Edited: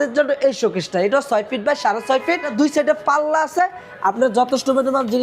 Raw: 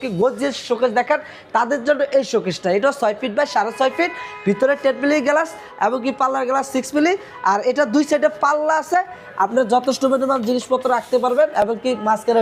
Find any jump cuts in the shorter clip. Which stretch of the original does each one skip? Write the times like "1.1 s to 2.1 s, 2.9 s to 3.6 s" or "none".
4.2 s to 7.8 s